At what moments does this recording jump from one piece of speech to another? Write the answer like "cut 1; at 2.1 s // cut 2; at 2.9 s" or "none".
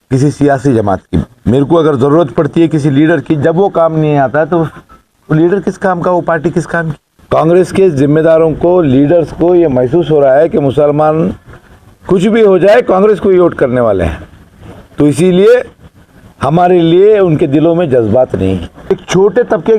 cut 1; at 1.3 s // cut 2; at 7.1 s // cut 3; at 18.7 s